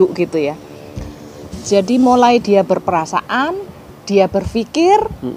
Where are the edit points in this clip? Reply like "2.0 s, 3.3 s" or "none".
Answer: none